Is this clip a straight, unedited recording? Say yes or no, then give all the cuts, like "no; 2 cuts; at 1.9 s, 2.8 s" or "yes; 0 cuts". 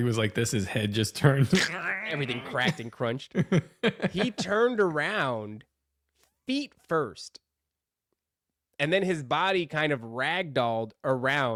yes; 0 cuts